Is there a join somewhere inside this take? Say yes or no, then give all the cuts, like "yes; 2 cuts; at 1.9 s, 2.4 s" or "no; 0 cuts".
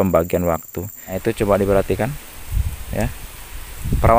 yes; 1 cut; at 1.2 s